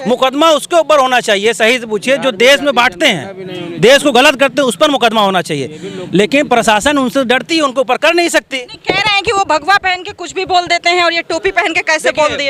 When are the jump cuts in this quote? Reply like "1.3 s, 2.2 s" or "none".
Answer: none